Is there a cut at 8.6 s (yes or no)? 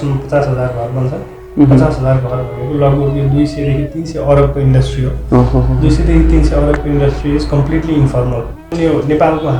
yes